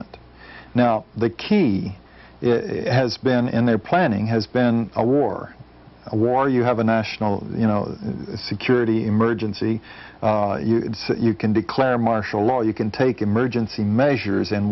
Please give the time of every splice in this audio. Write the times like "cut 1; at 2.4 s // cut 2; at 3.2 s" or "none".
none